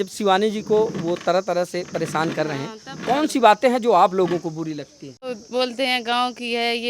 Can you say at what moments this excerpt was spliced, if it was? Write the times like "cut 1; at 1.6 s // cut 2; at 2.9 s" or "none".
cut 1; at 5.4 s